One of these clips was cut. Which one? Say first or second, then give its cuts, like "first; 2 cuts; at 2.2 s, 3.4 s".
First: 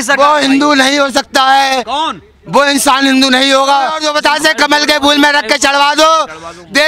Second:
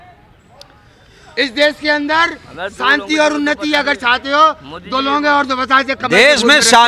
first; 1 cut; at 4.0 s